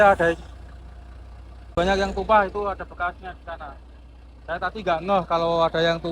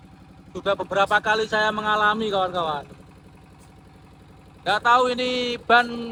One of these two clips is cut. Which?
first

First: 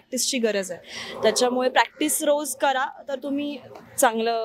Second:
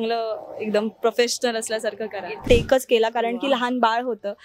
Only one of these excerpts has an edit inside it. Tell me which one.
second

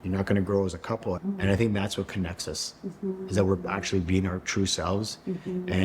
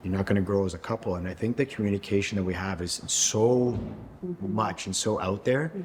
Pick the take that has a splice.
first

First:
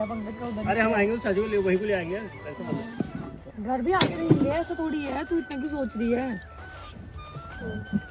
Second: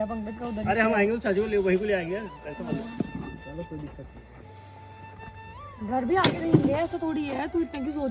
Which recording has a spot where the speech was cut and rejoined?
first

